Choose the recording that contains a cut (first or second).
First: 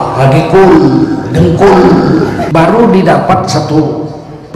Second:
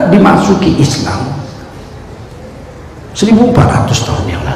first